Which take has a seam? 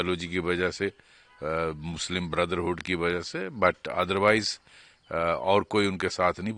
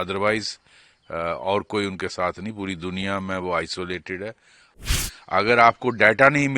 second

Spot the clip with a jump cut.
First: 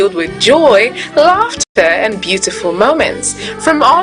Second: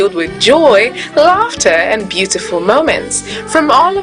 second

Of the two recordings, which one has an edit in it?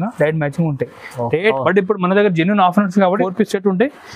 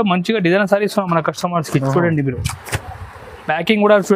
first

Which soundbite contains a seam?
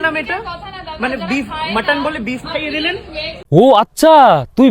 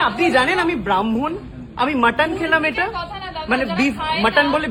first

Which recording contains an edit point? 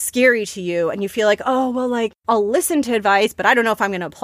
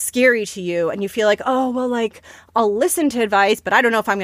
first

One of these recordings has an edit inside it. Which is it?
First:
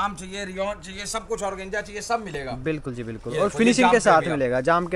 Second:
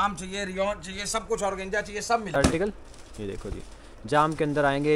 second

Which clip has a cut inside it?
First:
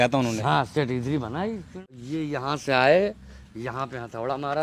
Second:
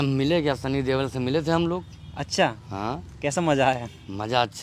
first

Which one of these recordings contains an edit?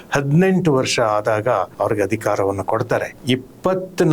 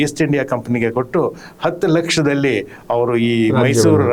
first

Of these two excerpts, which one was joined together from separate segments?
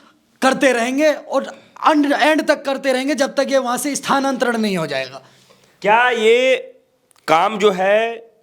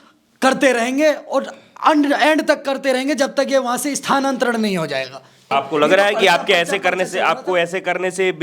second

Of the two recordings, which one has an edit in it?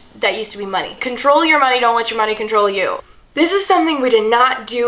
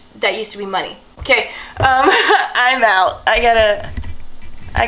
first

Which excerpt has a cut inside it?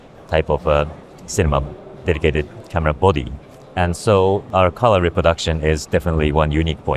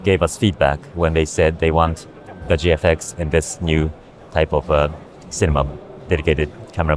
first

